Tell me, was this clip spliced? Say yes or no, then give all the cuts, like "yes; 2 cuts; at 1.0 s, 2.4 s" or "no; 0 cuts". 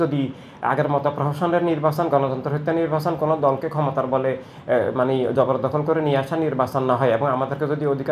no; 0 cuts